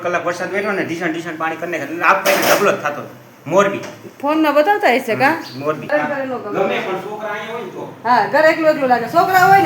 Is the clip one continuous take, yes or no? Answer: no